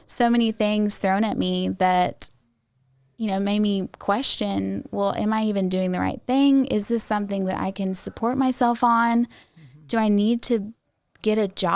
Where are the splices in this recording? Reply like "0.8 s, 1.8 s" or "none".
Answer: none